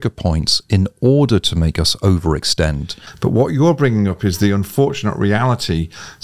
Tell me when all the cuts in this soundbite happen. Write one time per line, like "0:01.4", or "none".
0:03.1